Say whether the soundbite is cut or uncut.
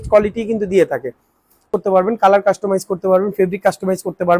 cut